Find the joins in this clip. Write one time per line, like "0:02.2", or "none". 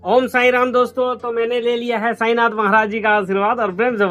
none